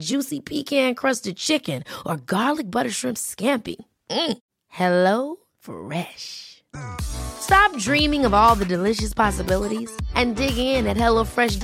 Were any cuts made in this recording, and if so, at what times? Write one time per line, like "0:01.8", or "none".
none